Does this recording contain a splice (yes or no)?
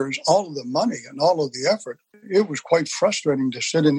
yes